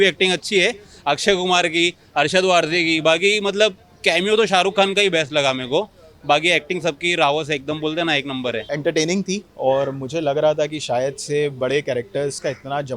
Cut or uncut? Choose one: cut